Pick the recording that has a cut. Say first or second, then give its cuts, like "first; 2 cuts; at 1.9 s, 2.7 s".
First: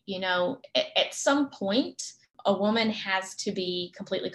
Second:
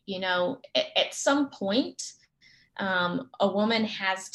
first; 1 cut; at 2.3 s